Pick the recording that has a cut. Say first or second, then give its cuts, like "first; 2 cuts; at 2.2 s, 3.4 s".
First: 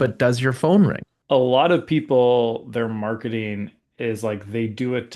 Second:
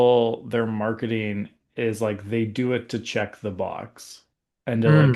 first; 1 cut; at 1.1 s